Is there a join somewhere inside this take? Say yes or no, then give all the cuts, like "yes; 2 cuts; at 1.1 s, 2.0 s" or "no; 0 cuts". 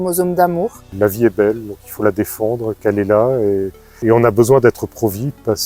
yes; 2 cuts; at 1.0 s, 3.9 s